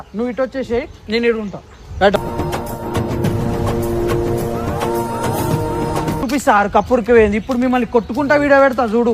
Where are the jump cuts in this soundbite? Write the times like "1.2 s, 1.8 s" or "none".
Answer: 6.2 s